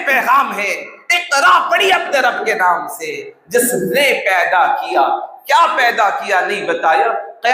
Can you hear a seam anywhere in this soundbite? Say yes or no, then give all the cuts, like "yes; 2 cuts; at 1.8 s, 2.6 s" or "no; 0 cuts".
no; 0 cuts